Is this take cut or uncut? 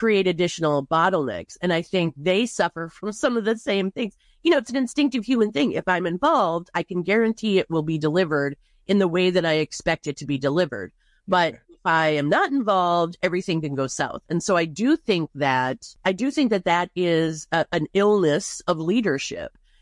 uncut